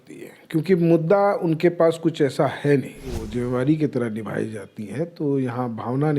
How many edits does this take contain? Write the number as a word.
one